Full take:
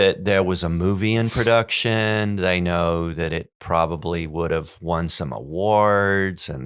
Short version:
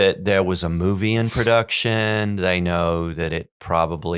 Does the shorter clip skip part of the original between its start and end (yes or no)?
no